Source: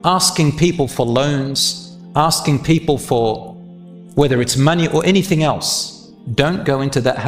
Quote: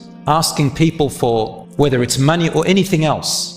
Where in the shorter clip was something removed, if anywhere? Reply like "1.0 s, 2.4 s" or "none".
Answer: 1.6 s